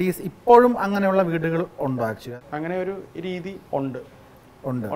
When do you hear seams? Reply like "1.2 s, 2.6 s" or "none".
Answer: 2.2 s

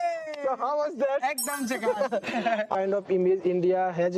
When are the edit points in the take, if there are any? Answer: 2.8 s

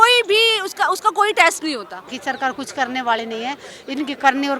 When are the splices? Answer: 2.1 s

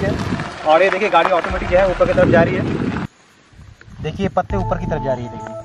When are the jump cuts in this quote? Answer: 3.0 s

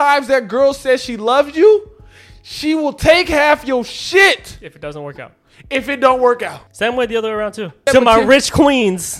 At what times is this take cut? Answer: 6.6 s, 7.8 s

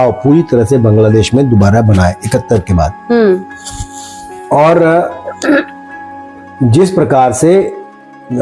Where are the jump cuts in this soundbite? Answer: none

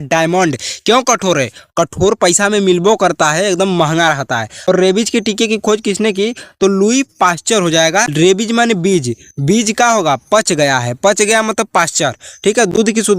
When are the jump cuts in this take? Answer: 4.7 s, 8.1 s

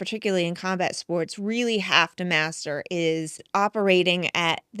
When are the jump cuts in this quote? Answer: 3.4 s

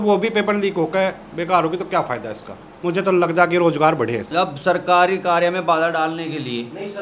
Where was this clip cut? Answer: 4.3 s

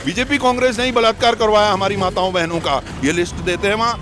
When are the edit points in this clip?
2.9 s

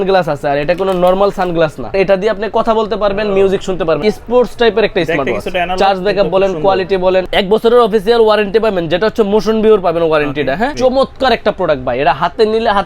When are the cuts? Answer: 1.9 s, 4.0 s, 7.3 s, 10.7 s

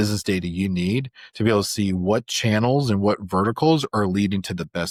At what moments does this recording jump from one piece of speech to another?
none

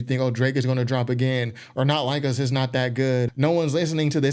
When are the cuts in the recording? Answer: 3.3 s

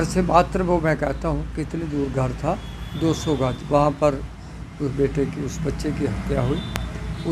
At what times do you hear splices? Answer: none

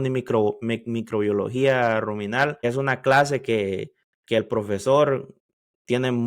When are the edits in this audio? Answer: 2.6 s

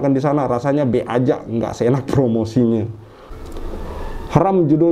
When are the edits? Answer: 3.3 s

